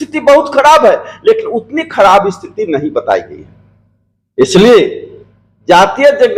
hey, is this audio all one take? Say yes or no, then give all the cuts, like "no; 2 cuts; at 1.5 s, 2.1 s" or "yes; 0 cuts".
yes; 0 cuts